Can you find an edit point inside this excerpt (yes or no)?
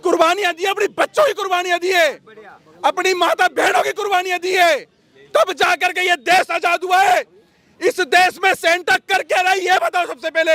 no